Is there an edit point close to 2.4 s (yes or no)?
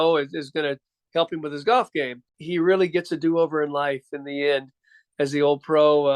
yes